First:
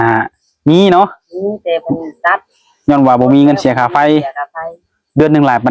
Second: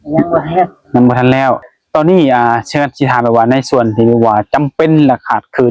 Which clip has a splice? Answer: second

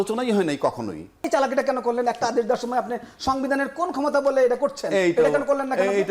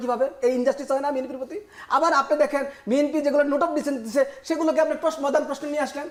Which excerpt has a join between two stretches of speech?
first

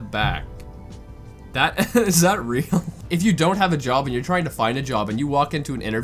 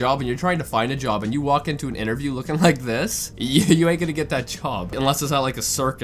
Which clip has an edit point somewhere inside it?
first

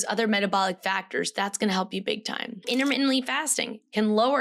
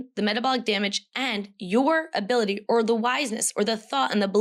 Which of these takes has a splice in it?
first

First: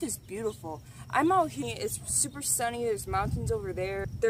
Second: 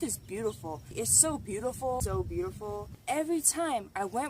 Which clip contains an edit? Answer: second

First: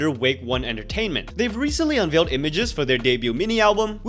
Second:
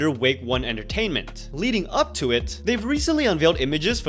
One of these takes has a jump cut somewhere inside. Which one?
first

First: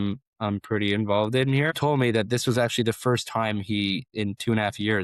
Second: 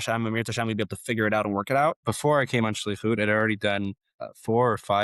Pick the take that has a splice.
second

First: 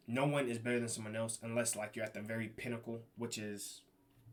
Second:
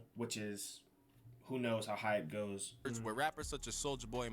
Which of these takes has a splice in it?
second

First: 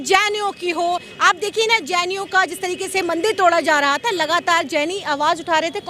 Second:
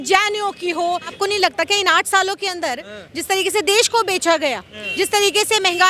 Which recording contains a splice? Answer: second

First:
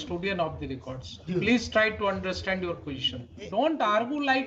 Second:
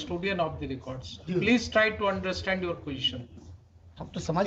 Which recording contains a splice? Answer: first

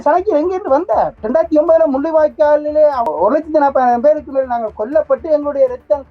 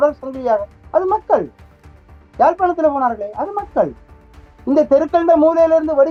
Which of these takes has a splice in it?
first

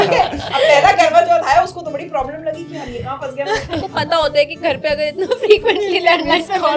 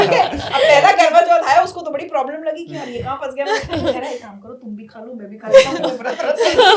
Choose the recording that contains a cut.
first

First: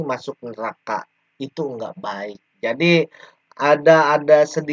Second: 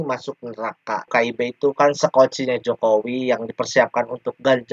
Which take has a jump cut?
second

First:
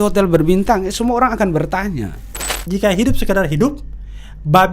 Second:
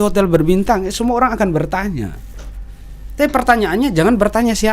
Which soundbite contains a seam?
first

